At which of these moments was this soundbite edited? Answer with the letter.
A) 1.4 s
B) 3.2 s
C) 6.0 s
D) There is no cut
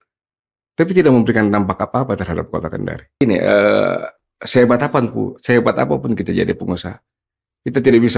B